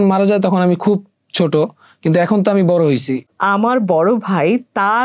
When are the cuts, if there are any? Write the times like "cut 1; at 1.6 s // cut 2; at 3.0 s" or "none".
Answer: cut 1; at 3.3 s